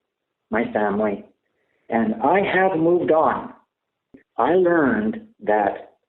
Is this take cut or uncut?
cut